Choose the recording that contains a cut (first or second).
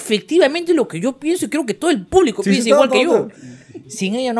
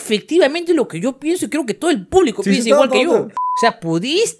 second